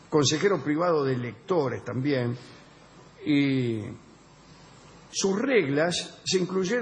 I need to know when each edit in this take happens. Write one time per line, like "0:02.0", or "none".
0:02.8